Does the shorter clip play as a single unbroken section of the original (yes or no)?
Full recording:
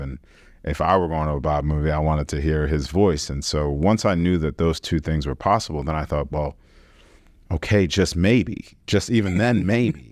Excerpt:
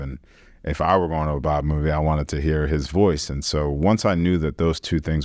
yes